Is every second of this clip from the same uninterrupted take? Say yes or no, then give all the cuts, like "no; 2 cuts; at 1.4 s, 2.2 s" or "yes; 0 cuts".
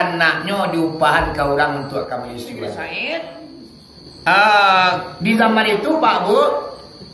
no; 1 cut; at 2.7 s